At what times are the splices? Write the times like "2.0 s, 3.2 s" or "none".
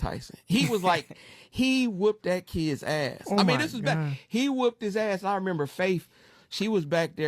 5.4 s